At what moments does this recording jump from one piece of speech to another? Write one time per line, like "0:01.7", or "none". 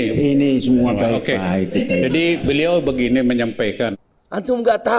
0:03.9